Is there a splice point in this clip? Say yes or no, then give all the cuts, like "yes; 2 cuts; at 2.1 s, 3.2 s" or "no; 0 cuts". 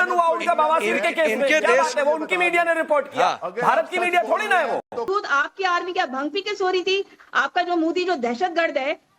yes; 1 cut; at 5.1 s